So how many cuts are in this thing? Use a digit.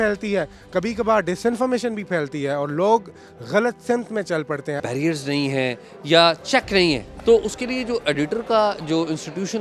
2